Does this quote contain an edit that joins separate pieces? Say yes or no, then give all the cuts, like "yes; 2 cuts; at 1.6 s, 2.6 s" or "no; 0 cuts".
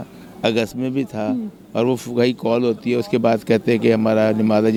no; 0 cuts